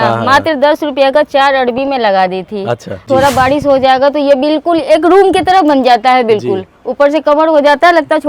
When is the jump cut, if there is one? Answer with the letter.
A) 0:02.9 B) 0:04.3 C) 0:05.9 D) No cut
A